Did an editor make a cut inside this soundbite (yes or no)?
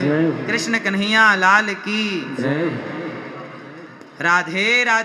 no